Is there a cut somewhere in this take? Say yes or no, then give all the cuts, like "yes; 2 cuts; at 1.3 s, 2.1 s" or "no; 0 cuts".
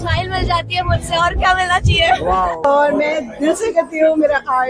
yes; 1 cut; at 2.6 s